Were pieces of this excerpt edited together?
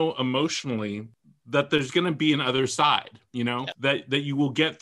yes; 2 cuts; at 1.1 s, 3.7 s

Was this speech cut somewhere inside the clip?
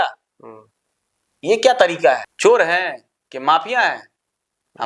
yes; 1 cut; at 2.3 s

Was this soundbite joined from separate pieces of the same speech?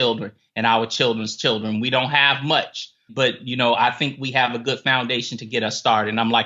yes; 1 cut; at 3.0 s

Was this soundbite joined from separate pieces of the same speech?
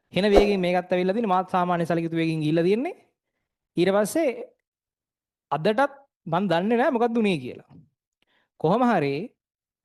no; 0 cuts

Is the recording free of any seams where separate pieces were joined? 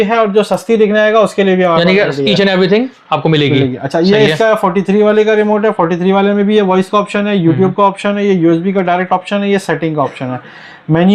yes; 0 cuts

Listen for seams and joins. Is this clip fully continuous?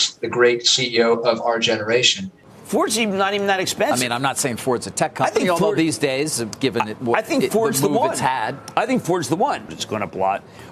no; 2 cuts; at 2.4 s, 9.6 s

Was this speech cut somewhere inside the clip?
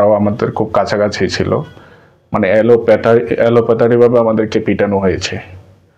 no; 0 cuts

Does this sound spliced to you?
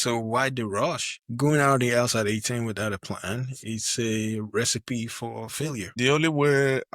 yes; 2 cuts; at 1.1 s, 5.9 s

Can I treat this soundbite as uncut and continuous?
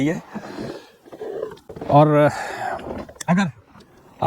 yes; 0 cuts

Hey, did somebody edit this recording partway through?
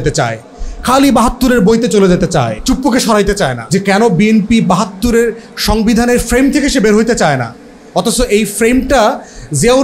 yes; 2 cuts; at 2.5 s, 3.6 s

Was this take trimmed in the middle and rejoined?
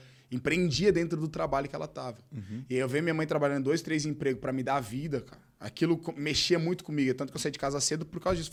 no; 0 cuts

